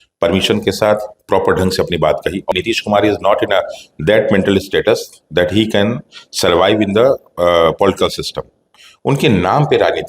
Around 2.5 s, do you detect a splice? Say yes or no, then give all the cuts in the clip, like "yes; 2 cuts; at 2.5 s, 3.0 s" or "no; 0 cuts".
yes; 1 cut; at 2.5 s